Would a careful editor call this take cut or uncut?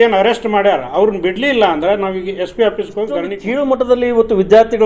cut